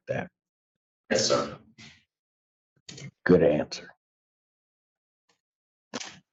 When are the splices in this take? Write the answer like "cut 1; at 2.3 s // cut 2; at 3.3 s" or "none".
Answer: none